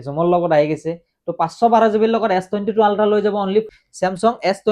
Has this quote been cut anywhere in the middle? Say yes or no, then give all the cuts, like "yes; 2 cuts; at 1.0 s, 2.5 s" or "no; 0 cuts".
yes; 1 cut; at 3.8 s